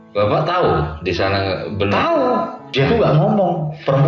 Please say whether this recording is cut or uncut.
cut